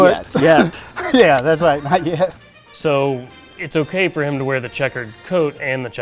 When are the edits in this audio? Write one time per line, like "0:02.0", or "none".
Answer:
0:02.4